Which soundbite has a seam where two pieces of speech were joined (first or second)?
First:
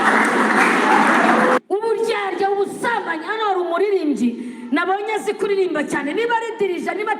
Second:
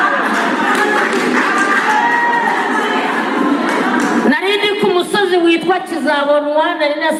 first